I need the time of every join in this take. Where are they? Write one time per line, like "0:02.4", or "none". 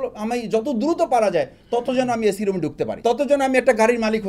0:02.9